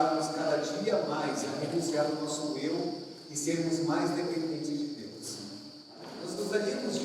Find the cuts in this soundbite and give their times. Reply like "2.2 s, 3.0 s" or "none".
6.1 s